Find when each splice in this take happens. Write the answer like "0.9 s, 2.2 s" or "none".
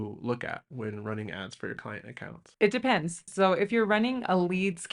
none